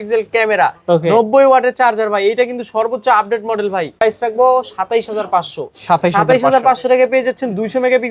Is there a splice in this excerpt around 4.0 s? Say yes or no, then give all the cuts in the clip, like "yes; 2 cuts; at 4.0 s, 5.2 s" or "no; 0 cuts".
yes; 1 cut; at 4.0 s